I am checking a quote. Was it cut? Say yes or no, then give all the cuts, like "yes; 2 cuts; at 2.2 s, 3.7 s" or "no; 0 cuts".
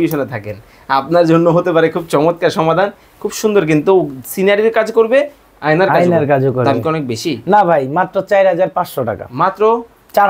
no; 0 cuts